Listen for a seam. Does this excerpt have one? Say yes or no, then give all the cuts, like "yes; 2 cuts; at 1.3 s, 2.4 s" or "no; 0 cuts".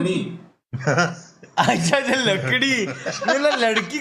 no; 0 cuts